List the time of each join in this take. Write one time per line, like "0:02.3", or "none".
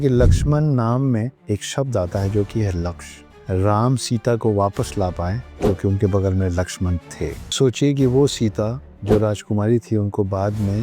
0:01.4
0:03.3
0:05.5
0:07.5